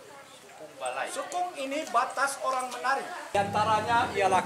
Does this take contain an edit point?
yes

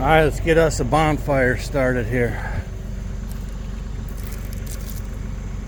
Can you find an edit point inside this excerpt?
no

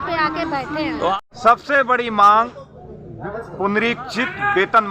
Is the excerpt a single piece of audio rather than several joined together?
no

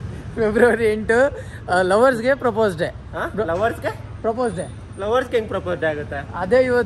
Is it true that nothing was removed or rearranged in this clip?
yes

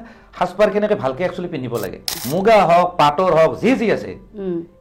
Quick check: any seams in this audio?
yes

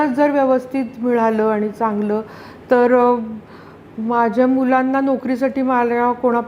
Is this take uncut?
yes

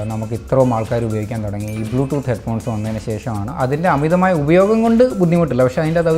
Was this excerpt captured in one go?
no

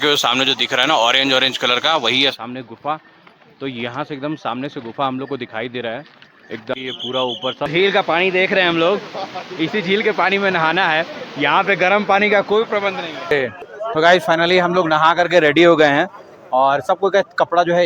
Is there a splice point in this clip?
yes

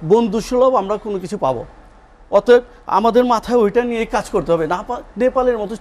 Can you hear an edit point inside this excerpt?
no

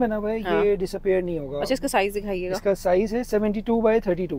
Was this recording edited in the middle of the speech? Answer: no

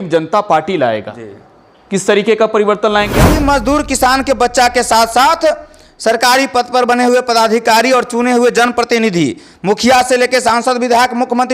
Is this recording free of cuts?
no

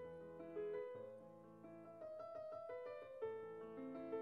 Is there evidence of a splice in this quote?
no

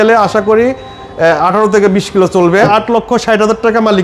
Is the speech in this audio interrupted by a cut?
yes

